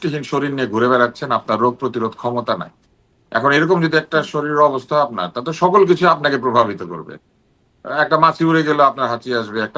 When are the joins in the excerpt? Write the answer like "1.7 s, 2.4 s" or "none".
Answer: none